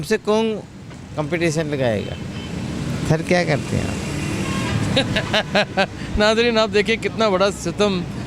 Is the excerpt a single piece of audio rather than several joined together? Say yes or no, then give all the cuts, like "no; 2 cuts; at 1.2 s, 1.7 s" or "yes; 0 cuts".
yes; 0 cuts